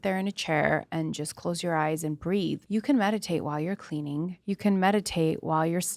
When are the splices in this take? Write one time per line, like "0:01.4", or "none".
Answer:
0:02.6
0:04.4